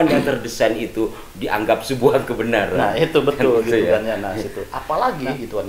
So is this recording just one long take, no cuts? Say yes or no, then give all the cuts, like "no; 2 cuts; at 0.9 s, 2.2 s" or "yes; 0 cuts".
no; 1 cut; at 4.7 s